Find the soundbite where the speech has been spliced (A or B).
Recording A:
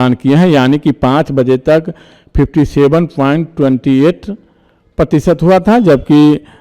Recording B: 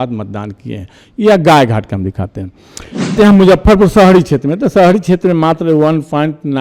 B